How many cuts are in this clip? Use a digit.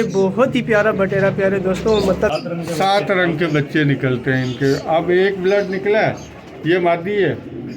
1